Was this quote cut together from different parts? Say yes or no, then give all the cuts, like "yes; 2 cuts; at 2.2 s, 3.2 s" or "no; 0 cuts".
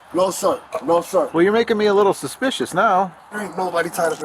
yes; 1 cut; at 3.2 s